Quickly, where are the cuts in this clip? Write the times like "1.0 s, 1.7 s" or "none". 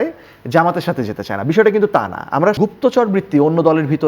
2.6 s